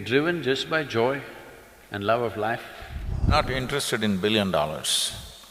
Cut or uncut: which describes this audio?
cut